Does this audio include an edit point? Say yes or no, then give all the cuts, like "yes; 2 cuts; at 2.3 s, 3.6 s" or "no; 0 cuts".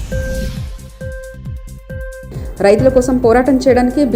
yes; 1 cut; at 2.2 s